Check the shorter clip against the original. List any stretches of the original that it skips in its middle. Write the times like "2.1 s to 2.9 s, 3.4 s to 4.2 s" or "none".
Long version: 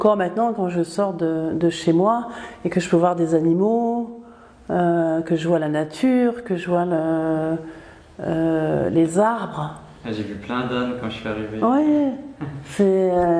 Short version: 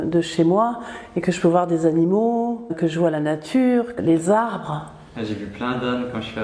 4.2 s to 5.2 s, 6.5 s to 8.9 s